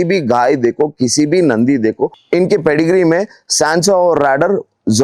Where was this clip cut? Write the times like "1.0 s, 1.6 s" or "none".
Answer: 2.1 s